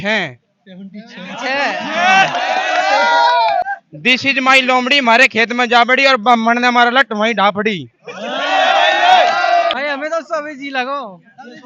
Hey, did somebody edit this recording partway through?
yes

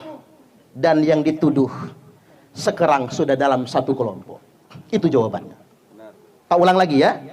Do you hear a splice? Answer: no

